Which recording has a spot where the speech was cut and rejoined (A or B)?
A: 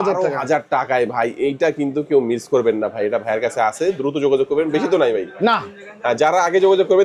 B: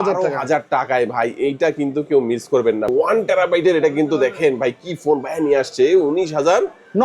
B